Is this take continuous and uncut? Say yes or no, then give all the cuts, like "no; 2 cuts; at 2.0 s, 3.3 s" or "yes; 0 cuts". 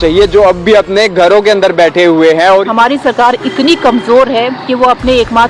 no; 1 cut; at 2.4 s